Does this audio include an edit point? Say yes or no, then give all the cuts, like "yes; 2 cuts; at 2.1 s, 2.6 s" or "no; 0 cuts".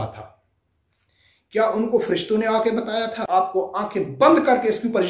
yes; 1 cut; at 3.3 s